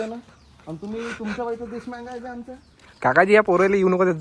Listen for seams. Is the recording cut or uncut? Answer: uncut